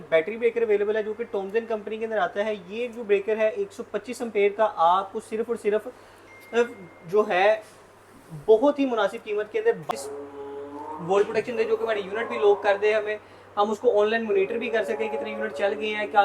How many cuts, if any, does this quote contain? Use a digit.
1